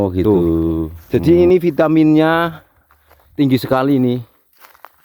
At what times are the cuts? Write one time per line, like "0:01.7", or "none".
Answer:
0:01.0

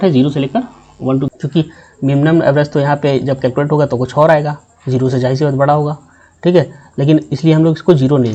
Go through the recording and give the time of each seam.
0:01.3

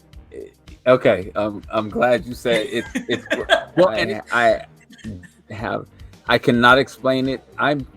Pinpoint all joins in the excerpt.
0:04.0

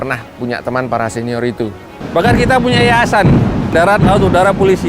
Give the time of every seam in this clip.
0:01.9
0:03.7

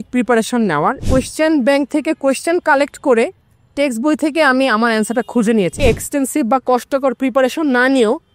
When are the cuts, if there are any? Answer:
0:01.0
0:05.8

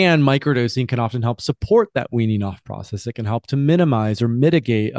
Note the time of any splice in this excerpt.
none

